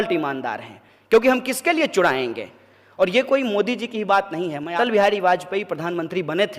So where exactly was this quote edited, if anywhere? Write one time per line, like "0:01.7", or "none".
0:04.7